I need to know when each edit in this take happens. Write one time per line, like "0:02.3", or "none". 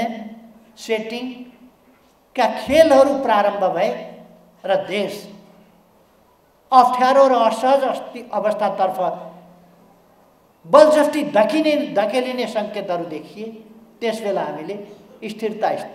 none